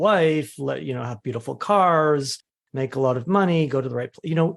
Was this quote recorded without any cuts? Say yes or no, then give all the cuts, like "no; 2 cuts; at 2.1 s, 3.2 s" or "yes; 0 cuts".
yes; 0 cuts